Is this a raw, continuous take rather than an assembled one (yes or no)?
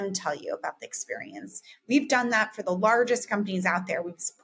yes